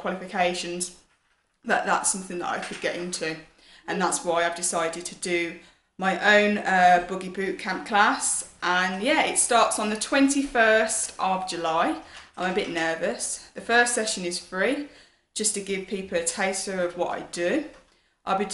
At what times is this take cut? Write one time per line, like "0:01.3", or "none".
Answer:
0:09.4